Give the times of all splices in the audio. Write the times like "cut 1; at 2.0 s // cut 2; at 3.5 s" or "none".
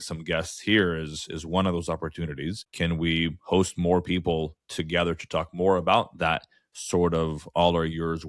cut 1; at 2.6 s